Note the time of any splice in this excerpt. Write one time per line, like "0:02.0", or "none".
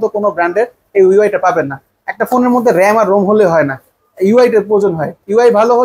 none